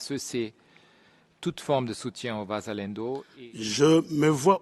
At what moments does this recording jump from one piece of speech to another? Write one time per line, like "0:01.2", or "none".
0:03.3

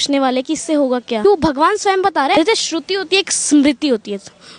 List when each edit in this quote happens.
0:01.2
0:02.3

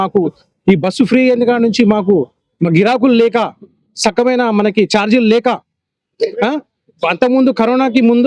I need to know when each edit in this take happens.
none

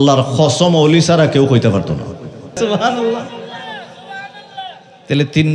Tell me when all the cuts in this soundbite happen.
0:02.6

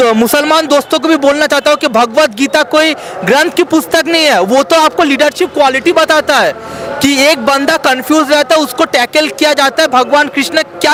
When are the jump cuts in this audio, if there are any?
none

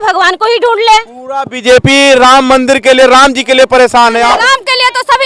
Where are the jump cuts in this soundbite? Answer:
0:04.4

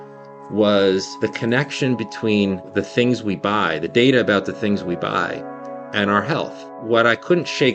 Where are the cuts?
0:01.1
0:02.7
0:06.7

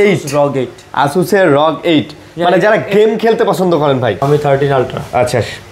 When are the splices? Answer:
0:04.2

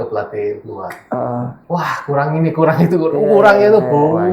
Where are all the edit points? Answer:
0:01.6

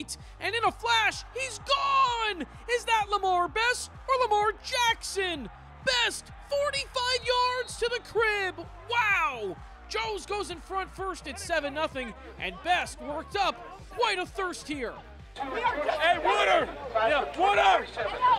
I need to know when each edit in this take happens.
0:09.7

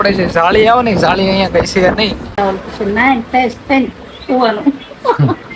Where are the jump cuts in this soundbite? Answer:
0:02.4

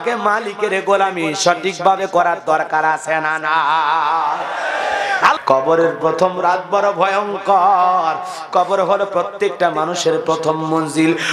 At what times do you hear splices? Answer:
0:05.4

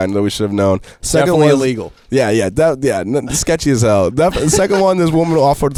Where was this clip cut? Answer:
none

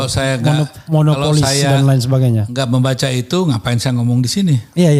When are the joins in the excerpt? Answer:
none

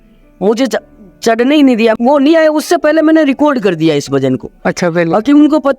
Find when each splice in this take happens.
0:02.0

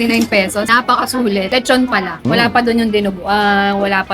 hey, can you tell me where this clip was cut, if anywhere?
0:02.2

